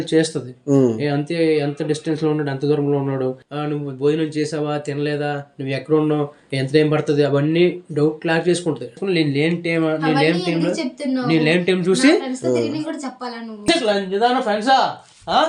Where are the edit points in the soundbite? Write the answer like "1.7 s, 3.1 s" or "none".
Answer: none